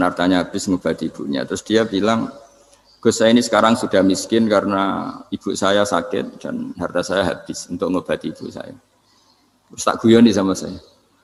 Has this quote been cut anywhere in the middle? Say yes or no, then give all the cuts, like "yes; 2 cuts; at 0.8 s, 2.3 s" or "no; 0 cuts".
no; 0 cuts